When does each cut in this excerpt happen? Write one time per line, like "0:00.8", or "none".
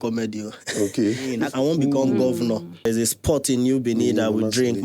0:01.4
0:02.9